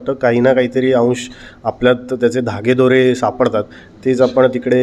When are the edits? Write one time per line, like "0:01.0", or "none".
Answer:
none